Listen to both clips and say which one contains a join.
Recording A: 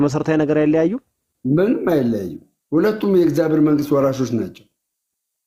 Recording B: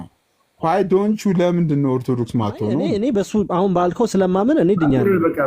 B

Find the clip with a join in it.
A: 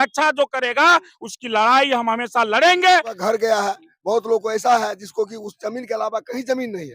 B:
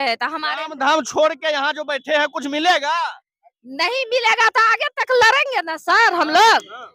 A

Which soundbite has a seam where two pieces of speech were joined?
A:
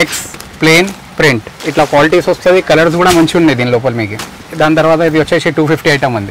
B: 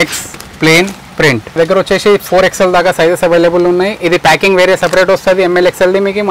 B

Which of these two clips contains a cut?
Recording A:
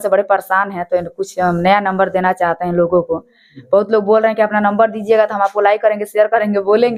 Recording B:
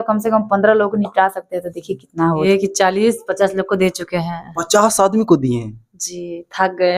B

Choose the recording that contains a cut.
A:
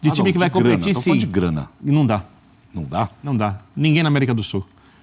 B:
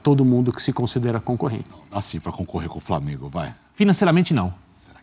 B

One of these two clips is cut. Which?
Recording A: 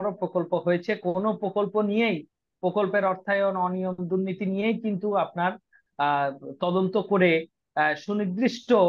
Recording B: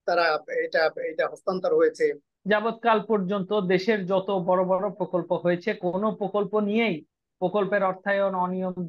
B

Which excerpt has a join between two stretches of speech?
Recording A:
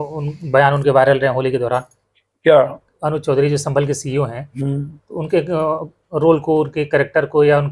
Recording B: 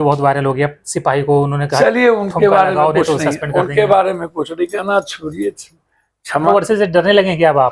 B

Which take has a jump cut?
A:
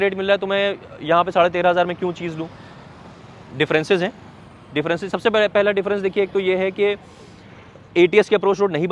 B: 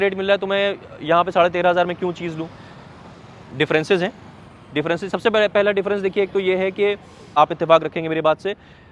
B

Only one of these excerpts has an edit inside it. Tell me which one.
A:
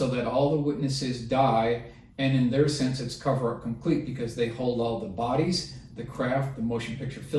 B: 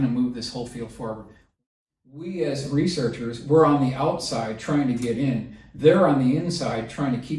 B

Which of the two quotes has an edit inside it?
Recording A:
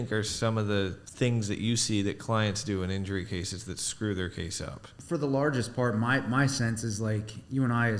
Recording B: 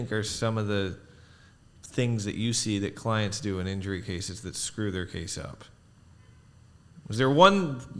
A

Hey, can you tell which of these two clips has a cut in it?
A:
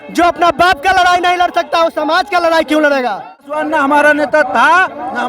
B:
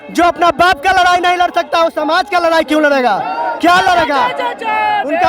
A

